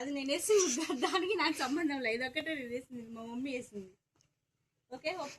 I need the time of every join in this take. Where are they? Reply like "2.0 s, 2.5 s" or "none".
none